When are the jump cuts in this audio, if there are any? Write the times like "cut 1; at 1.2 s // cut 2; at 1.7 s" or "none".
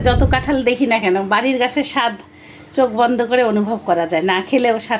none